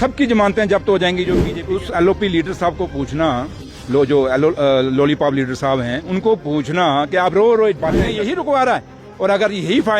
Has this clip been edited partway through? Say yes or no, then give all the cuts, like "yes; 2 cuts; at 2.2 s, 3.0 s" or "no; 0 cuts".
yes; 2 cuts; at 1.5 s, 8.2 s